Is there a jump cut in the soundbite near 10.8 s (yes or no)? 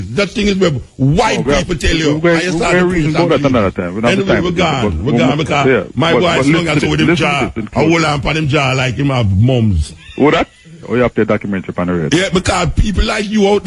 yes